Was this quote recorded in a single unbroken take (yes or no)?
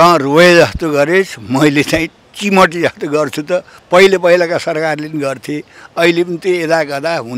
yes